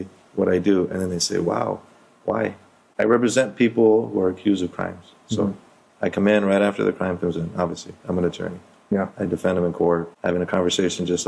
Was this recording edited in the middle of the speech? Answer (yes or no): yes